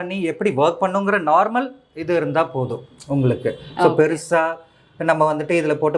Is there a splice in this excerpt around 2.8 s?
no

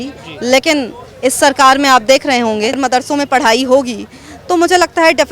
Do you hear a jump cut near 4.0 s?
no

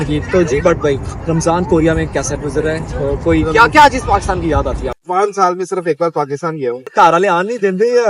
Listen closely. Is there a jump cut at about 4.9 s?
yes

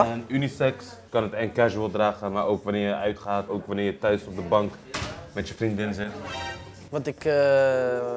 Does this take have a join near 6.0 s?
no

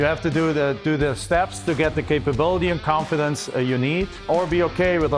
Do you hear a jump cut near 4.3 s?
yes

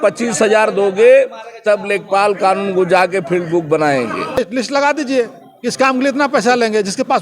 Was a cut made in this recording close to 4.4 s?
yes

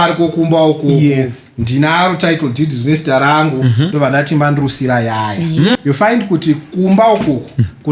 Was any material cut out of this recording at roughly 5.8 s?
yes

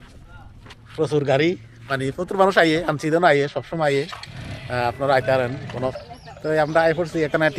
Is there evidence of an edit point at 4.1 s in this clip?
no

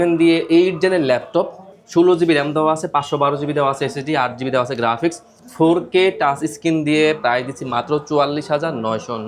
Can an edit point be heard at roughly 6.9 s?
no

